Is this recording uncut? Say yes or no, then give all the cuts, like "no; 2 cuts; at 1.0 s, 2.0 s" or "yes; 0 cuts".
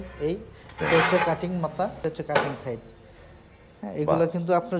no; 1 cut; at 2.0 s